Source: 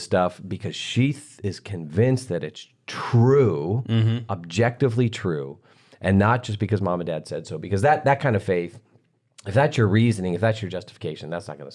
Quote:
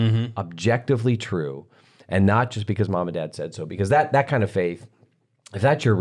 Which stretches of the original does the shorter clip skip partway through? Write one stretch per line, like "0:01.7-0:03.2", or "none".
none

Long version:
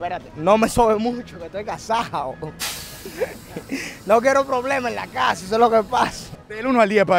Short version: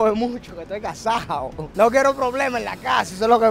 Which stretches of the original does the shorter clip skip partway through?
0:02.5-0:03.9

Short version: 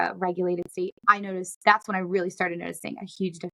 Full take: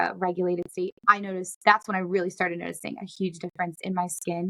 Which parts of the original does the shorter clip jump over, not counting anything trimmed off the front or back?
none

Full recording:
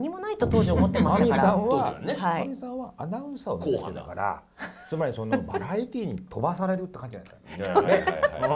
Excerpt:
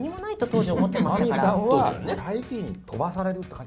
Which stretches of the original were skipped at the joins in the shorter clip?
0:02.1-0:05.5

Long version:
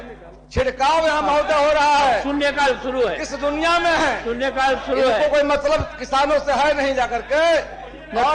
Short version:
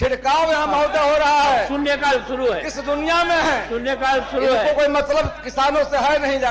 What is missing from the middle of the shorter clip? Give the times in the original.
none

